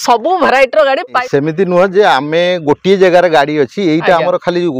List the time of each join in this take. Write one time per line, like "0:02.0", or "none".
0:01.2